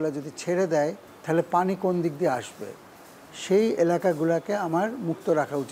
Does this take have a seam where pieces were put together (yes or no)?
yes